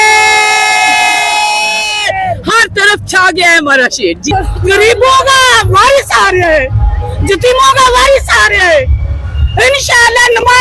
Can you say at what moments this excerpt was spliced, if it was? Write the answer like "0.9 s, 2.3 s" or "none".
4.2 s